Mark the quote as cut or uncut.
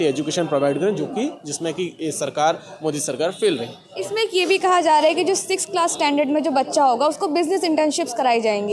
uncut